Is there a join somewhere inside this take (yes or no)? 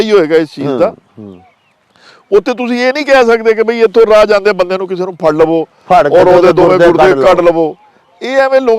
no